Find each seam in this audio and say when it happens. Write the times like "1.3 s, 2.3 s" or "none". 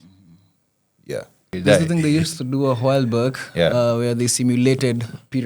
1.5 s